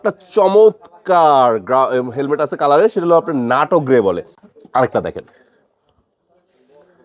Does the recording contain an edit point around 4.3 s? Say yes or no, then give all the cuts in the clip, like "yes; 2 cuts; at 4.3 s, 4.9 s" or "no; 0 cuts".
yes; 1 cut; at 4.3 s